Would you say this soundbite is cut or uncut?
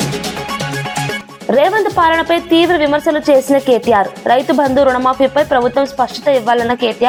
uncut